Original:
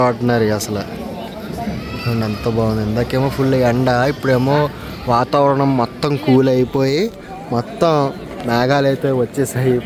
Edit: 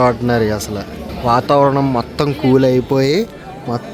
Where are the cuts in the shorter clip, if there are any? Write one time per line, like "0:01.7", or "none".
0:01.1

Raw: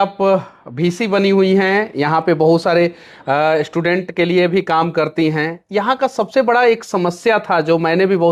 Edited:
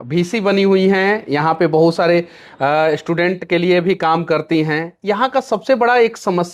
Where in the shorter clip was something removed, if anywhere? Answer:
none

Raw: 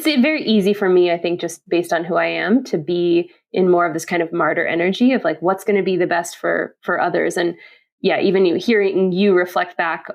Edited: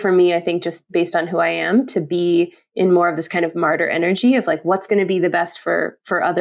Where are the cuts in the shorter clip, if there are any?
none

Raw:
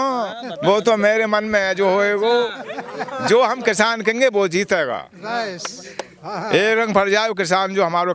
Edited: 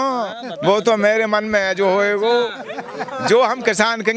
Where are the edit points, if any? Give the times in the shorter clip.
none

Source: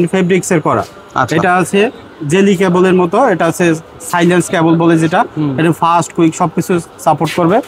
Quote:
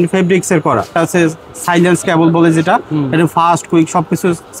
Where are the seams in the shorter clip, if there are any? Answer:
0:00.9

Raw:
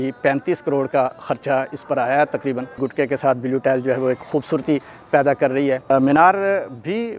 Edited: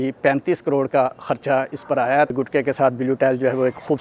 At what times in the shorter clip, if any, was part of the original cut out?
0:02.3

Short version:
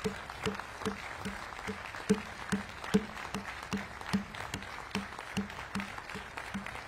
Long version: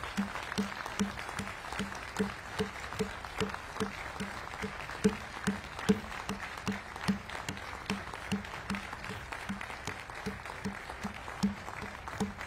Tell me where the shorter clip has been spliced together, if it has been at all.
none

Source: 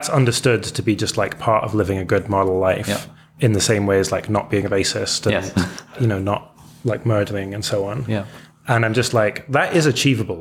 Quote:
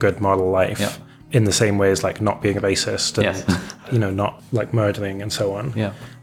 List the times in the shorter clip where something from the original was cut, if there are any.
0:04.4

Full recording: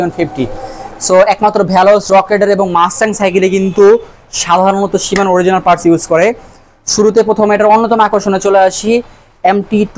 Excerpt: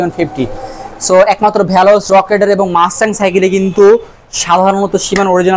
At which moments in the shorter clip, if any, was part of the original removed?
none

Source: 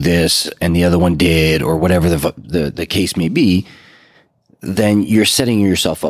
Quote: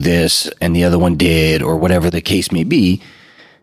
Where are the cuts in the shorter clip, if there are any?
0:02.1

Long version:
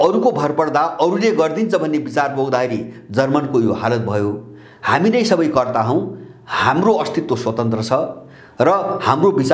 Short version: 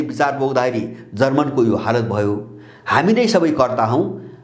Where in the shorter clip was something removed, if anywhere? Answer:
none

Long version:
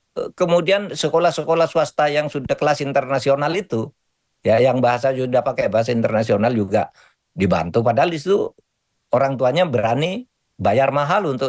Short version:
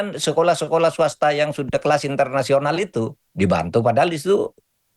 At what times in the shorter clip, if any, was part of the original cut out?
0:03.2

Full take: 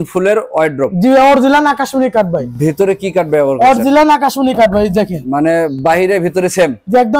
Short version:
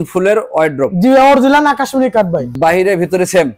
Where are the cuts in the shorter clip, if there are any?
0:02.5

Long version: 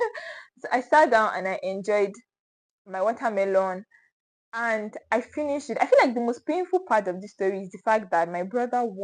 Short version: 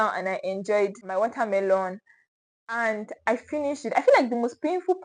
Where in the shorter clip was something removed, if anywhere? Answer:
0:01.0

